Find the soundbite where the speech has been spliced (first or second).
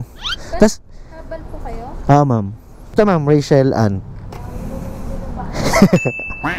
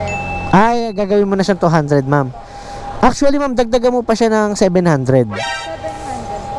first